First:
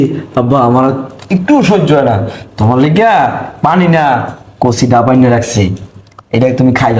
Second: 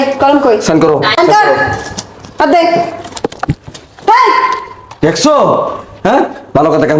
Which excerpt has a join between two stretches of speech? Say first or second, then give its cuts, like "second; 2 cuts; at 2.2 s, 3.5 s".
second; 1 cut; at 1.2 s